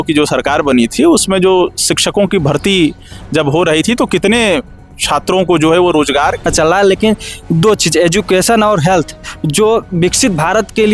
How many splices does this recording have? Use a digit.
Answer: 1